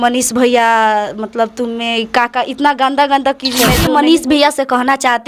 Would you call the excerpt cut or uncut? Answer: cut